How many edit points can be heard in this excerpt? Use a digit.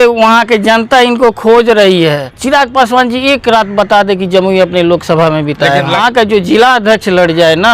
2